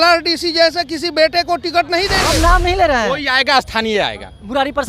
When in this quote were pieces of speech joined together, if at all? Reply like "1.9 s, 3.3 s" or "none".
2.2 s

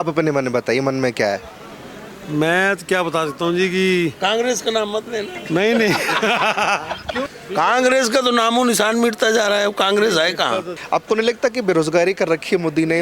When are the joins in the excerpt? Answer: 7.3 s, 10.7 s

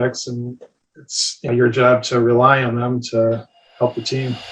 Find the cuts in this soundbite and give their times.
1.5 s, 3.6 s

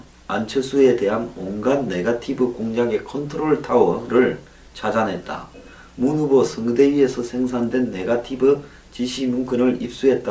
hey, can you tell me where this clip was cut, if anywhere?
none

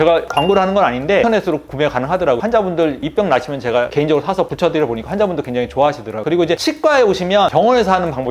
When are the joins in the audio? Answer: 1.2 s, 6.2 s

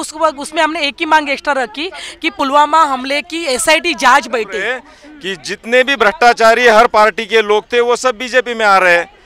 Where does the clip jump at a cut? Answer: 4.8 s

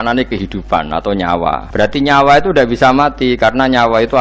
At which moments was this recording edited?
1.6 s

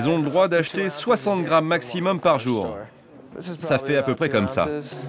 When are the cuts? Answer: none

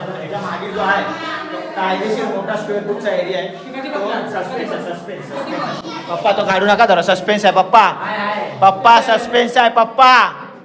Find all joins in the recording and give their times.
none

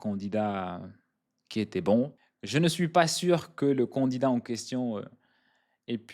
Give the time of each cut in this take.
2.1 s

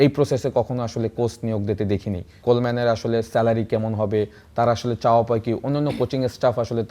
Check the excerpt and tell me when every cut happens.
2.4 s

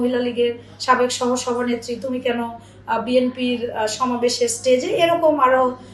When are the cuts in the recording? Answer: none

